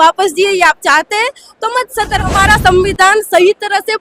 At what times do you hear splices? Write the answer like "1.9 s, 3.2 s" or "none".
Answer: 2.3 s